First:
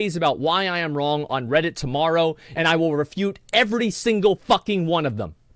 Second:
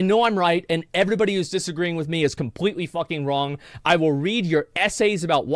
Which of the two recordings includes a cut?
first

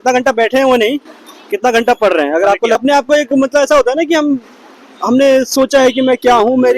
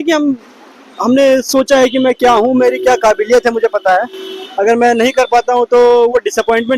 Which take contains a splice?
first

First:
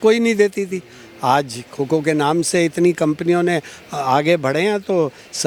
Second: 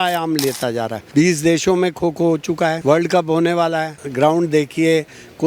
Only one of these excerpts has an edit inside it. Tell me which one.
second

